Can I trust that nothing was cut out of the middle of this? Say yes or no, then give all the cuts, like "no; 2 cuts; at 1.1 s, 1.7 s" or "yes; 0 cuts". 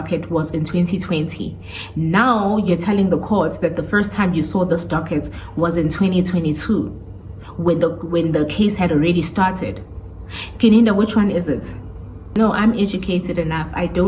no; 1 cut; at 12.3 s